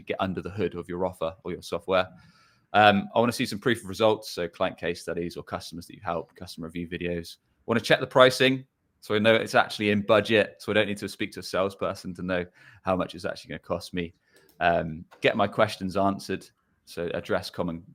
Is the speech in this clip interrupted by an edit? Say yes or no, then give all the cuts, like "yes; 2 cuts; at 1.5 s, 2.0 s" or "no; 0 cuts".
no; 0 cuts